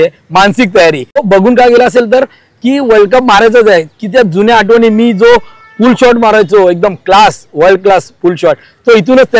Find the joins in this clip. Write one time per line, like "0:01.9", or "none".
0:01.2